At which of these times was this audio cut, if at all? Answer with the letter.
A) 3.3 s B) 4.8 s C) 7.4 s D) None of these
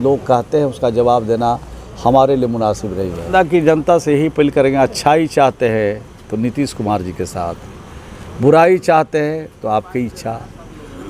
A